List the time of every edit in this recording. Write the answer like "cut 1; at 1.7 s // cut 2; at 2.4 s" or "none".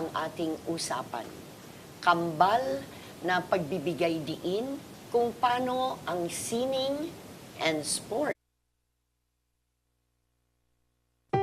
none